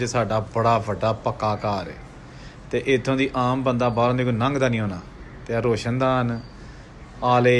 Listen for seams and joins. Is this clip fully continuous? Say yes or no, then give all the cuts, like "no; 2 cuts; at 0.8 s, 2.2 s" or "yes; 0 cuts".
yes; 0 cuts